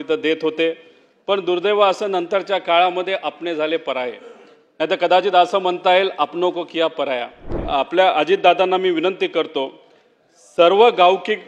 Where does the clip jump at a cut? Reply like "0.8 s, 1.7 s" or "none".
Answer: 7.6 s